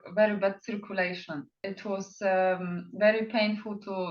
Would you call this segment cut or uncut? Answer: cut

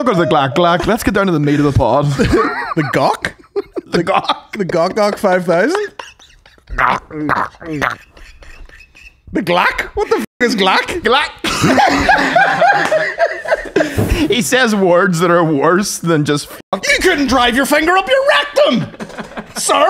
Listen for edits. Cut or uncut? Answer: cut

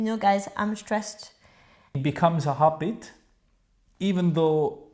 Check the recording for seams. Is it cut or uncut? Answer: cut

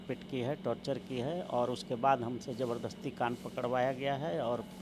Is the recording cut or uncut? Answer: uncut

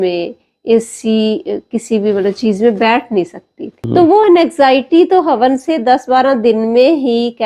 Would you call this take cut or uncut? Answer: cut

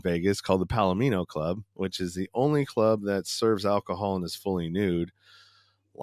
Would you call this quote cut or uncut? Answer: uncut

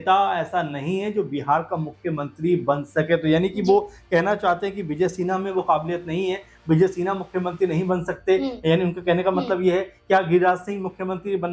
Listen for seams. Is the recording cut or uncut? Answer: uncut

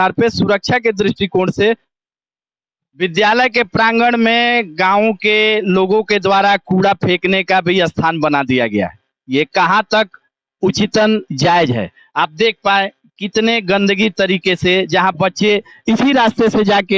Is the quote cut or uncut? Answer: cut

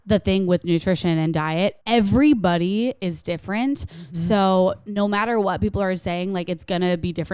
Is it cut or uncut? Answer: cut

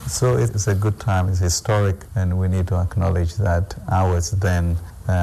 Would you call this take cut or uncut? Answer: uncut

